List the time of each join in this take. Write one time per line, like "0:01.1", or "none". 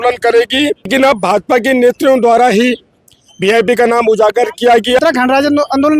0:00.8
0:05.0